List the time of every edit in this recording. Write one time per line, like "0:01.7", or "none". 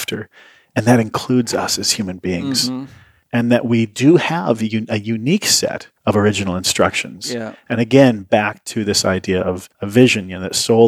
0:05.9
0:09.7

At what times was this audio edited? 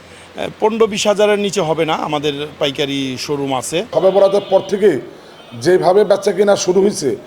0:03.9

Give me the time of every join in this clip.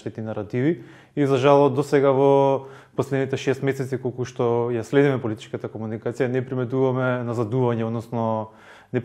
none

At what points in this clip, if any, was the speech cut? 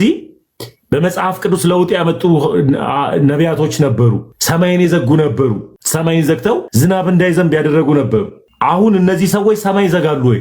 0:04.3
0:05.7
0:06.7
0:08.4

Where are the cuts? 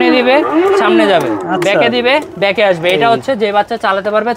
none

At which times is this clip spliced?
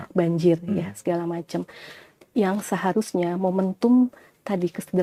none

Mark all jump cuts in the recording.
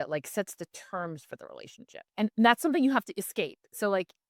0:02.0

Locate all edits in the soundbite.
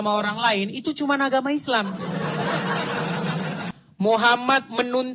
0:03.8

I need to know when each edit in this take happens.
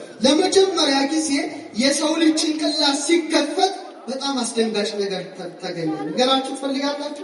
none

